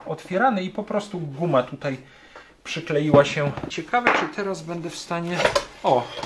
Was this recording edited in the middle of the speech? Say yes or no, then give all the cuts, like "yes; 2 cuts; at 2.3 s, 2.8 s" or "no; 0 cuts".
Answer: yes; 1 cut; at 3.7 s